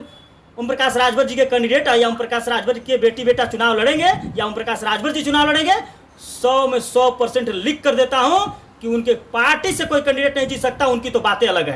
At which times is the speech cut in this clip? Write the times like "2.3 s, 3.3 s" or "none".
none